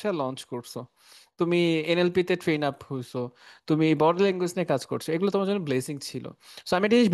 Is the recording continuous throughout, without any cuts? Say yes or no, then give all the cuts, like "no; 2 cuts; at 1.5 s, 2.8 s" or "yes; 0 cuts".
yes; 0 cuts